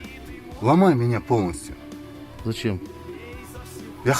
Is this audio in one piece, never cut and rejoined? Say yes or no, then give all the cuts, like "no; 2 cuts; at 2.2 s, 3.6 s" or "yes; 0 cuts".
yes; 0 cuts